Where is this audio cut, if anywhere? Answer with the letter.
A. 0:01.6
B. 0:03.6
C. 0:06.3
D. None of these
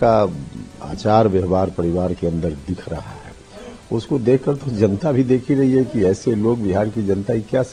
D